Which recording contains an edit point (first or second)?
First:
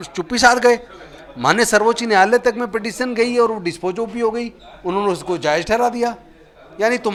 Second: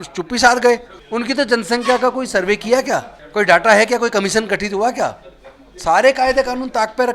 second